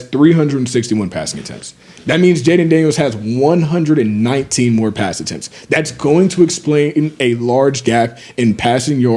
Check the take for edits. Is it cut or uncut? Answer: uncut